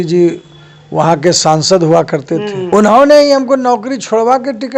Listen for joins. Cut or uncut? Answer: cut